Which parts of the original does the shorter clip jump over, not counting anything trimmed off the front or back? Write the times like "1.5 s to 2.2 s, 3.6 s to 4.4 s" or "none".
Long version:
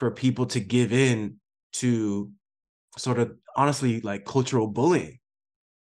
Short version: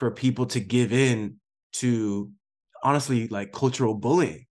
2.7 s to 3.4 s